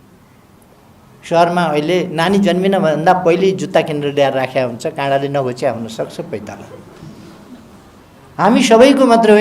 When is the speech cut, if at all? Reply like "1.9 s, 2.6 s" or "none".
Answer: 8.0 s